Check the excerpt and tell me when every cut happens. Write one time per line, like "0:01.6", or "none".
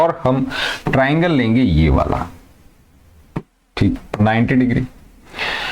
0:04.0

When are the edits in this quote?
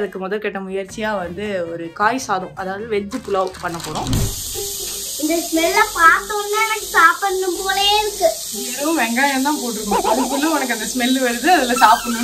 0:04.4

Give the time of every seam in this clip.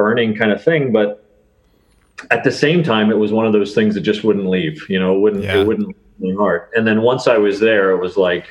none

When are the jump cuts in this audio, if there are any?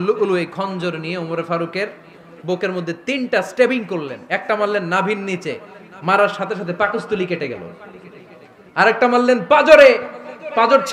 none

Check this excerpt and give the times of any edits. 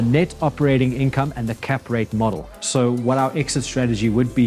0:02.5

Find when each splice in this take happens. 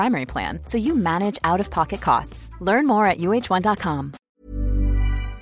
0:04.4

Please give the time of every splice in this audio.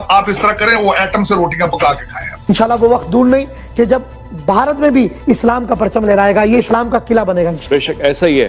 0:02.5

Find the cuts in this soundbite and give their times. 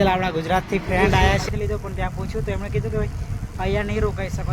0:01.4

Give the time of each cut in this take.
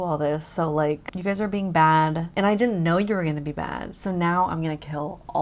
0:01.1
0:02.2

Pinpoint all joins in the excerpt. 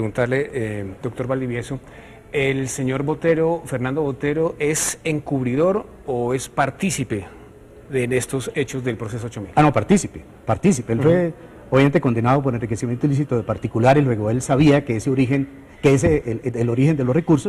0:13.7

